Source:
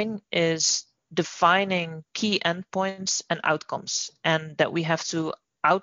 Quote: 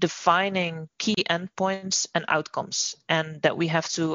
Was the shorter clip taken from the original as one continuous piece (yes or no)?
yes